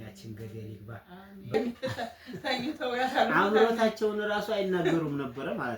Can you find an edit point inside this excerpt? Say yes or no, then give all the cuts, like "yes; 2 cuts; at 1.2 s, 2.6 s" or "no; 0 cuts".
yes; 1 cut; at 1.5 s